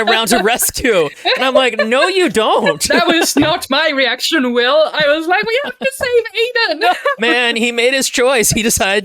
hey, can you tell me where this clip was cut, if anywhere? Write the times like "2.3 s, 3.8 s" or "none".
3.4 s, 7.2 s